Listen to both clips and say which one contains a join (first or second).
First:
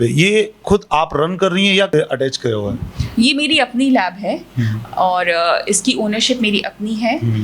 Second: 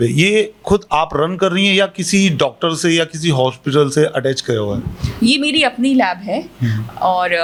first